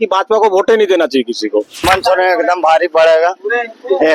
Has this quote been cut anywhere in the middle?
yes; 1 cut; at 1.8 s

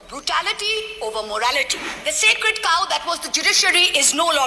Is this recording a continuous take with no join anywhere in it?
no; 1 cut; at 1.8 s

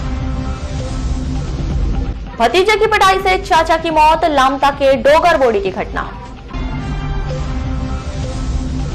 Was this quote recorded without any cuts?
yes; 0 cuts

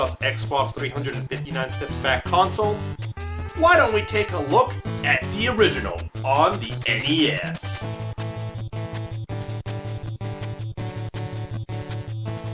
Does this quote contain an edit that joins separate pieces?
no; 0 cuts

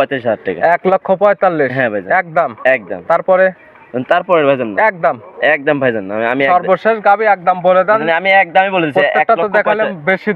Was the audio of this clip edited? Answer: no; 0 cuts

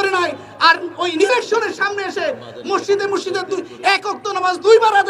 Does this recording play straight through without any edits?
yes; 0 cuts

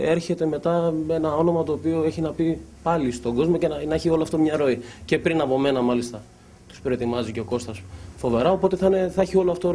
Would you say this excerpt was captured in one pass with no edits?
yes; 0 cuts

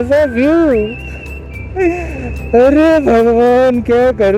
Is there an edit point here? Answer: no; 0 cuts

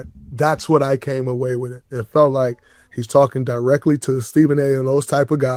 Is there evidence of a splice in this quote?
no; 0 cuts

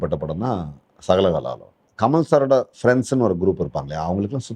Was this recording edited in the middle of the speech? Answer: yes; 1 cut; at 1.8 s

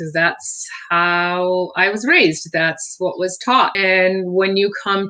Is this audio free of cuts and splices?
no; 1 cut; at 3.8 s

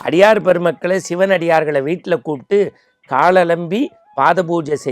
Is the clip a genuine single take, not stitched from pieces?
yes; 0 cuts

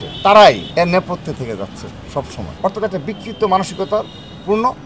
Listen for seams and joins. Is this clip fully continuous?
yes; 0 cuts

